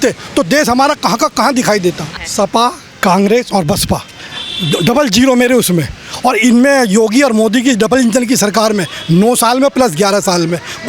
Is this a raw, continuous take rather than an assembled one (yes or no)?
no